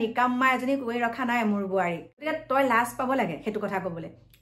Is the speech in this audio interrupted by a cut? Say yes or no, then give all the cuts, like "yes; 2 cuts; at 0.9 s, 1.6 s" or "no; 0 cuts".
yes; 1 cut; at 2.3 s